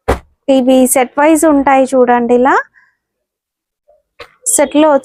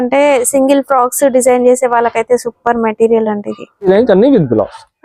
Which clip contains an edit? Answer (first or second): second